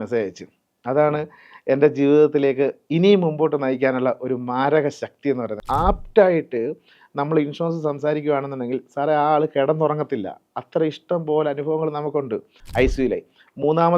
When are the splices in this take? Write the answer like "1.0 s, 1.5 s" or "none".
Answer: 5.6 s, 12.6 s